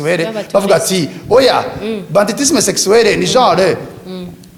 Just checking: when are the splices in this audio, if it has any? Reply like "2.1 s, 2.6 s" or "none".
none